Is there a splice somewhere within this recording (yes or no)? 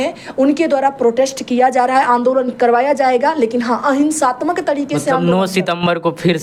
no